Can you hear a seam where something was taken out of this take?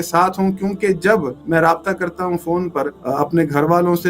yes; 2 cuts; at 1.4 s, 3.0 s

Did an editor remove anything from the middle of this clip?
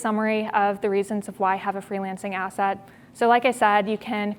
no; 0 cuts

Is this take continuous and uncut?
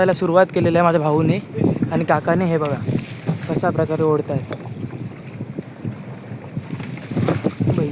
yes; 0 cuts

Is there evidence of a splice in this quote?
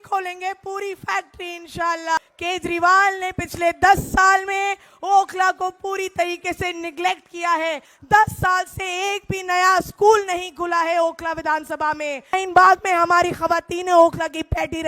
yes; 3 cuts; at 2.2 s, 7.9 s, 12.4 s

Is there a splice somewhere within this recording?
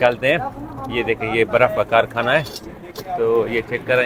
no; 0 cuts

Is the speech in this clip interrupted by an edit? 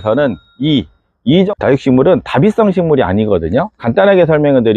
yes; 1 cut; at 1.5 s

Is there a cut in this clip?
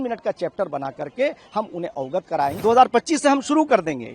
yes; 1 cut; at 2.5 s

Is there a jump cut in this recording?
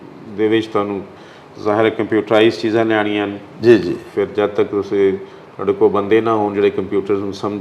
no; 0 cuts

